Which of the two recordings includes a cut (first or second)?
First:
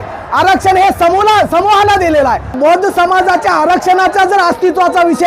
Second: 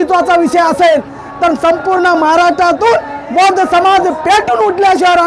first